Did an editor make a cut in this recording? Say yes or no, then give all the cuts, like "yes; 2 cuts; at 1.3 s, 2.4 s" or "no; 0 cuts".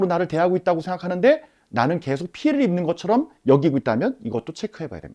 no; 0 cuts